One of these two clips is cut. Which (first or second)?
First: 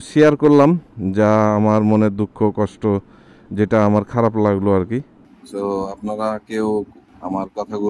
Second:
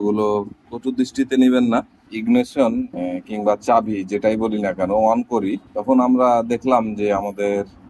second